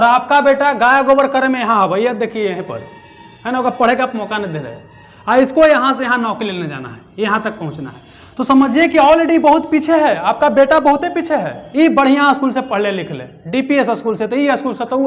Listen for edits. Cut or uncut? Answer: cut